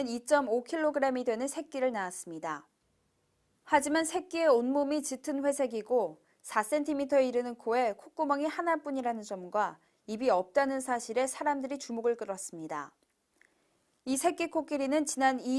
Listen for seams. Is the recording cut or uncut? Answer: cut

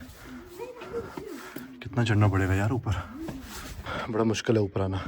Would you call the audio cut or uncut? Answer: cut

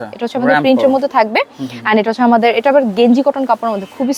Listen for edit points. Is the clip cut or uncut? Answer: uncut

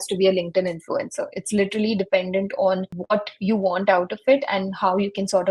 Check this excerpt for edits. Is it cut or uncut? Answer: uncut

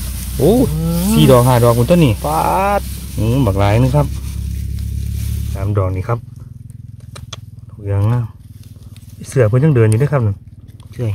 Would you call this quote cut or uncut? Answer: cut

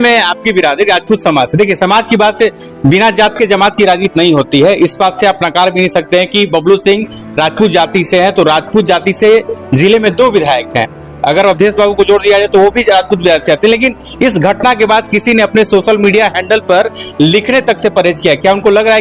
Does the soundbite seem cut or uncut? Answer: uncut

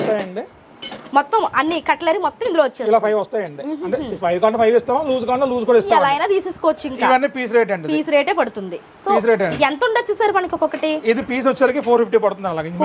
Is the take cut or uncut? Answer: uncut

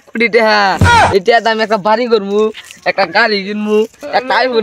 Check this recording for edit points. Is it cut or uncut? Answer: uncut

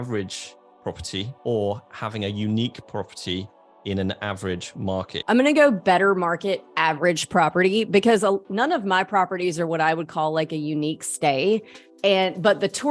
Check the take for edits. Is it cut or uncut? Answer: cut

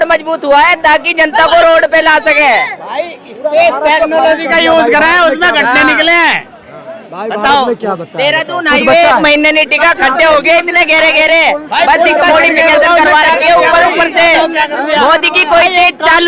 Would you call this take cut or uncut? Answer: uncut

